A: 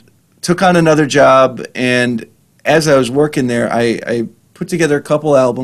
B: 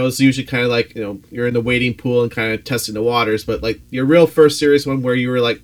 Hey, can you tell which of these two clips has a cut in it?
B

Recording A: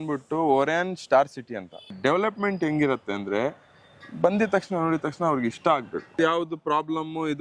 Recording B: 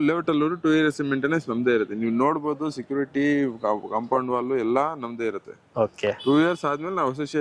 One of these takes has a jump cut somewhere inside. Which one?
A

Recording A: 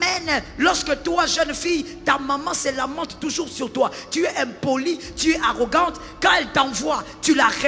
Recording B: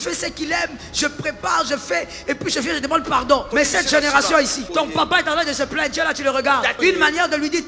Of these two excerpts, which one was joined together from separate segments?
B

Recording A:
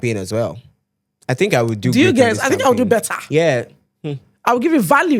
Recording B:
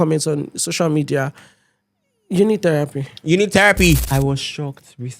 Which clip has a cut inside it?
B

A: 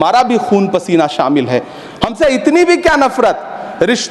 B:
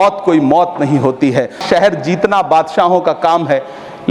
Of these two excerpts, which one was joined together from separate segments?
B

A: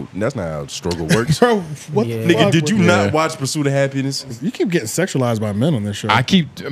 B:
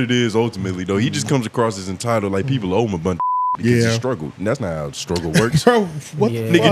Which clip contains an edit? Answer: A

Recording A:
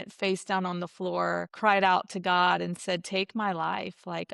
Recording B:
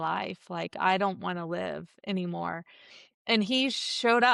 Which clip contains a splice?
A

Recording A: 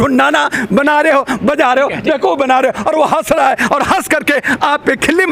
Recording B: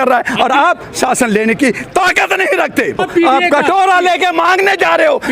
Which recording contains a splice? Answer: B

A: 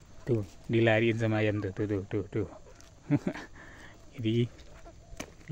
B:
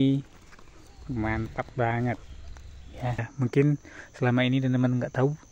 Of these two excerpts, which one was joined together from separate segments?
B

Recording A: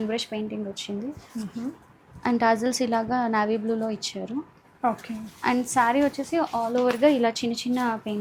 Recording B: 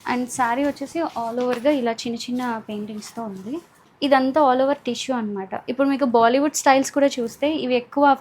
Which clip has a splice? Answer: B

